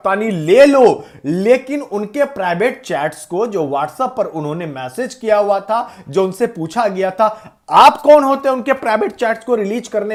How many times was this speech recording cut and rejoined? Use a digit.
0